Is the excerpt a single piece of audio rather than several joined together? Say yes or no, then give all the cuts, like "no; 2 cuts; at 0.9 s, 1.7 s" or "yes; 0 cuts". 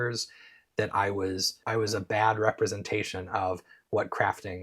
no; 1 cut; at 1.5 s